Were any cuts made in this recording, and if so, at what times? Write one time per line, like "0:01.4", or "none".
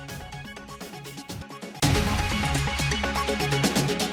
0:00.9
0:01.7